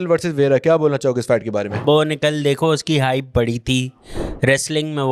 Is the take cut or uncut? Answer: cut